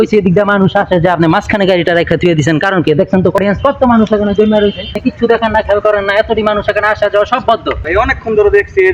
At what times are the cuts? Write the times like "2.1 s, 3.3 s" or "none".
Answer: 3.4 s, 4.9 s, 7.8 s